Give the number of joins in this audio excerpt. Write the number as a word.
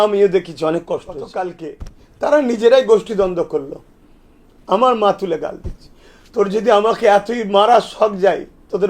one